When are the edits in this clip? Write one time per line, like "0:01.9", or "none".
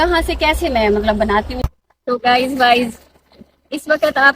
0:01.6